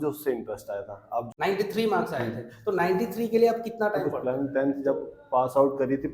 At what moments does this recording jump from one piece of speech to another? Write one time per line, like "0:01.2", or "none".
0:01.3
0:04.1